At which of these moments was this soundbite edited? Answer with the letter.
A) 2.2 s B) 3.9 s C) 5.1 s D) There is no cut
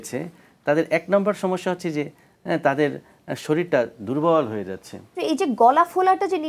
C